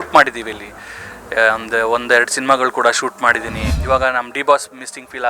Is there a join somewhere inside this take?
yes; 1 cut; at 3.7 s

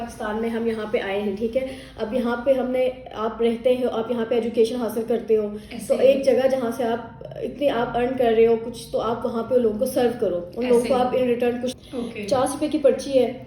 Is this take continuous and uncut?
no; 1 cut; at 11.7 s

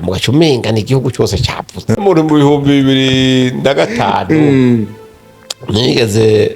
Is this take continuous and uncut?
no; 1 cut; at 2.0 s

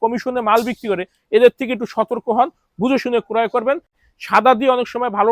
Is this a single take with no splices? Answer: no; 1 cut; at 4.0 s

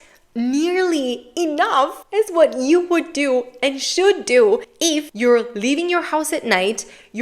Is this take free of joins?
no; 3 cuts; at 1.2 s, 2.0 s, 4.8 s

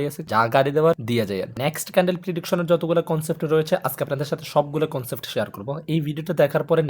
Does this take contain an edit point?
yes; 1 cut; at 1.5 s

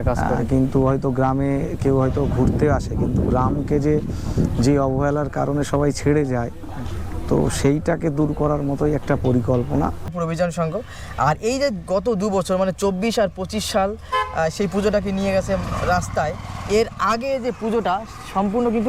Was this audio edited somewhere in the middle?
yes; 1 cut; at 10.1 s

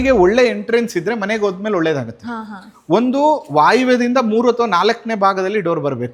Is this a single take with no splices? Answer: yes; 0 cuts

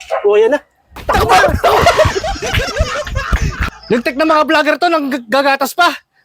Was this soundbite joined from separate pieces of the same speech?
yes; 1 cut; at 0.9 s

